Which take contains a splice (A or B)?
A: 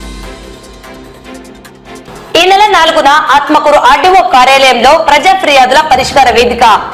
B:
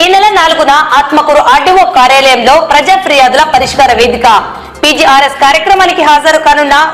A